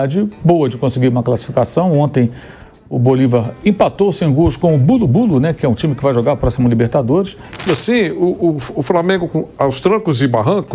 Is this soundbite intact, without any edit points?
no; 1 cut; at 7.6 s

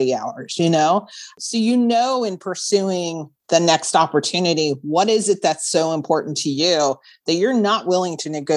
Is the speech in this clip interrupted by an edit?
yes; 1 cut; at 1.3 s

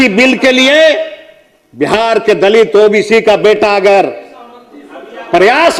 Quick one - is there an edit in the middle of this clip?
no; 0 cuts

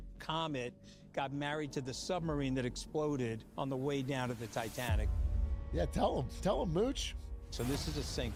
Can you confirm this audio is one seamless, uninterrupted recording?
yes; 0 cuts

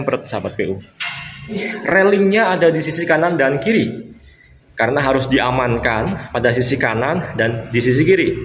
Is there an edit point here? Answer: yes; 1 cut; at 1.7 s

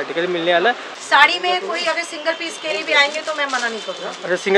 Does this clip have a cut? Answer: yes; 1 cut; at 0.9 s

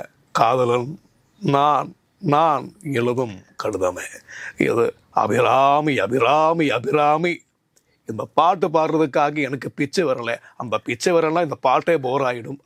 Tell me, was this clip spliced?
no; 0 cuts

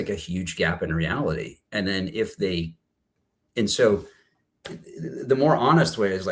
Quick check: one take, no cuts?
yes; 0 cuts

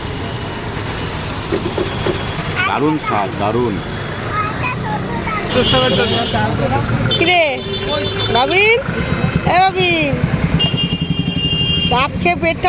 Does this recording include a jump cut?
no; 0 cuts

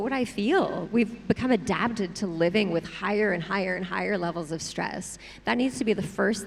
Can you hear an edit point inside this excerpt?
no; 0 cuts

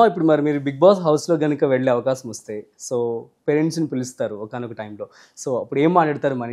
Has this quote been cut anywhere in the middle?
no; 0 cuts

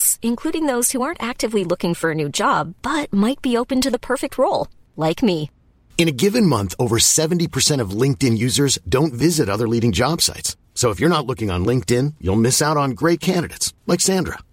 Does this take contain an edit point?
no; 0 cuts

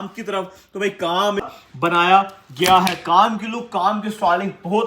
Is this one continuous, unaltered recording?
no; 1 cut; at 1.5 s

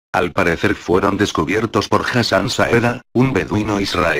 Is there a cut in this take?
no; 0 cuts

